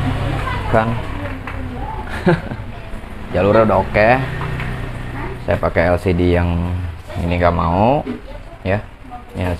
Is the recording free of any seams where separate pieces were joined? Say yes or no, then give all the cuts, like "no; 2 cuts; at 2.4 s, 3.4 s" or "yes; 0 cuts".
yes; 0 cuts